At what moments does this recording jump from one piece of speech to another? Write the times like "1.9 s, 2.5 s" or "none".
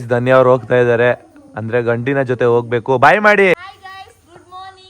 3.5 s